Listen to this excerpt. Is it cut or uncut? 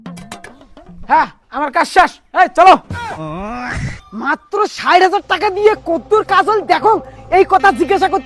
cut